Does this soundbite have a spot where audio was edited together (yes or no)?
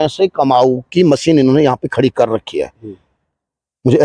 no